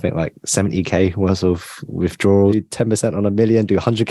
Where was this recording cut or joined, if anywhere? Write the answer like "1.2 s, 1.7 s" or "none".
2.5 s